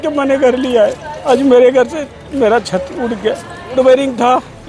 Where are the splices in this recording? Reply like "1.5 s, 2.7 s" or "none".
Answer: 1.1 s, 3.8 s